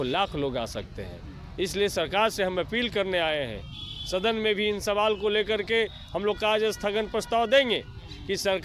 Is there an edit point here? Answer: no; 0 cuts

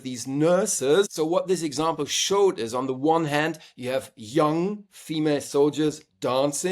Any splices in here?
yes; 1 cut; at 1.1 s

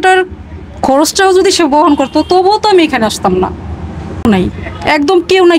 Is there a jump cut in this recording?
yes; 1 cut; at 4.2 s

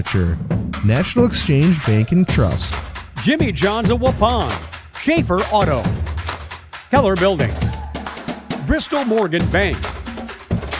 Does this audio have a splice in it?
yes; 1 cut; at 9.8 s

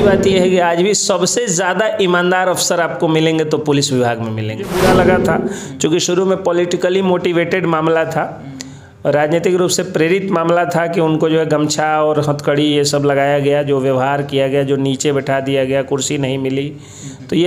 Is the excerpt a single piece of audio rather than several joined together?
no; 1 cut; at 4.7 s

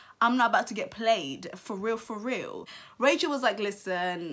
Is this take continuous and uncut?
yes; 0 cuts

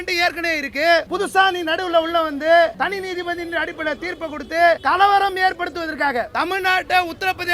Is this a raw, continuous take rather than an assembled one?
no; 4 cuts; at 1.1 s, 2.7 s, 4.8 s, 6.3 s

